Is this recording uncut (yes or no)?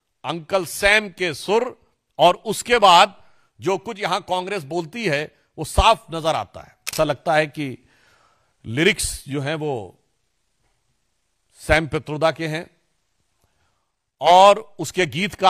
no